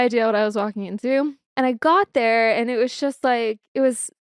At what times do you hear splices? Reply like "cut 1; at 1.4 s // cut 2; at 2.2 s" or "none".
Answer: cut 1; at 1.4 s